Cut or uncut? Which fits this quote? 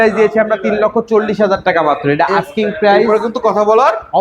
uncut